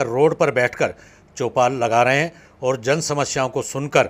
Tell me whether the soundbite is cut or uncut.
uncut